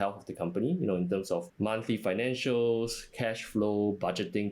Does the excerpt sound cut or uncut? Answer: cut